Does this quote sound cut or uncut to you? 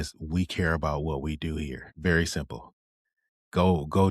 cut